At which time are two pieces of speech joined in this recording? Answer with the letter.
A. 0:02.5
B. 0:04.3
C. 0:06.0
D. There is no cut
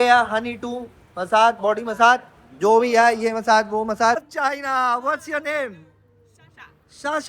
B